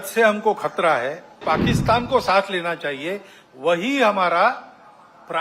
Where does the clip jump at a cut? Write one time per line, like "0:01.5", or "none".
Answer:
0:01.4